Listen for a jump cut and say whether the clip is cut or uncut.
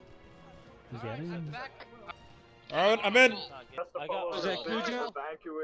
cut